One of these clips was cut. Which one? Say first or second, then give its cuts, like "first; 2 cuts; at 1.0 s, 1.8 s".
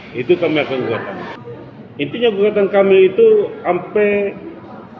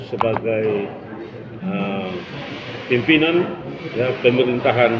first; 1 cut; at 1.3 s